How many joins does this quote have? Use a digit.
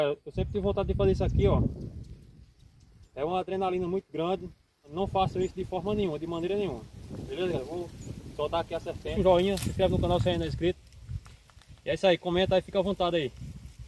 2